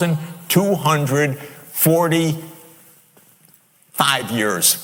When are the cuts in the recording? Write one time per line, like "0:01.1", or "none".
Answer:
none